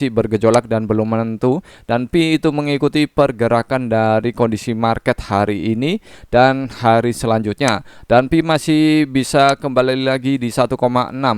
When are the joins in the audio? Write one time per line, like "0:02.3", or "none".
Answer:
none